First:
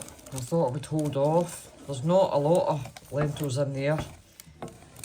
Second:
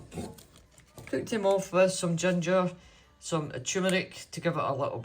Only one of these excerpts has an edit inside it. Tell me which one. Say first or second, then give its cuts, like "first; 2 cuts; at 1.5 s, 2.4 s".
second; 1 cut; at 0.9 s